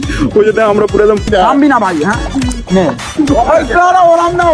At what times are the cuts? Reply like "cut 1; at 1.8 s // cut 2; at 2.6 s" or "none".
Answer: cut 1; at 1.3 s